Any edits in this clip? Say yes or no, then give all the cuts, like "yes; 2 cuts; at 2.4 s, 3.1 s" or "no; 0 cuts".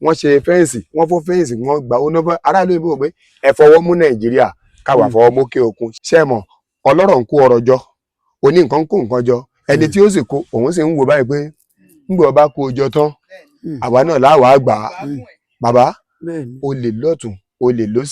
yes; 1 cut; at 5.9 s